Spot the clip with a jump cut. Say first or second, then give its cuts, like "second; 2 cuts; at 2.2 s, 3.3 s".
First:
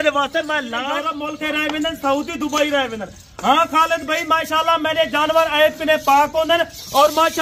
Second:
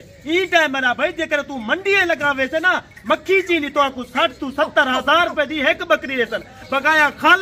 first; 1 cut; at 1.2 s